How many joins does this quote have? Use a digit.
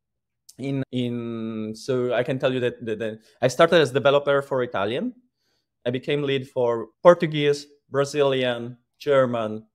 2